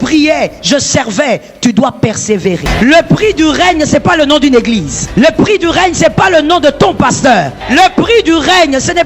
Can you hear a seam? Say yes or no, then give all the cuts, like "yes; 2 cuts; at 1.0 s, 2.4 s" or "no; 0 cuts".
yes; 3 cuts; at 2.7 s, 5.0 s, 7.6 s